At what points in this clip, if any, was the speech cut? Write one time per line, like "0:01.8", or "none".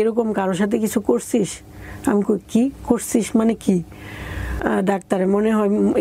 0:04.5

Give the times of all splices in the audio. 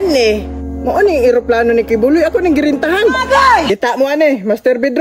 0:03.7

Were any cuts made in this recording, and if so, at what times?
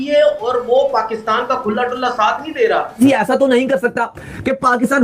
0:02.9

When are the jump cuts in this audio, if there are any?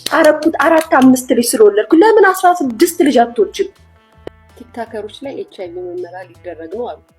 0:04.2

